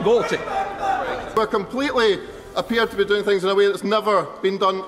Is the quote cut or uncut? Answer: cut